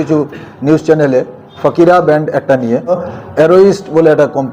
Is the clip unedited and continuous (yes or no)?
no